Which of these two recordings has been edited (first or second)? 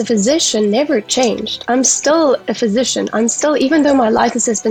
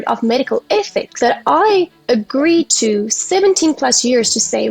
second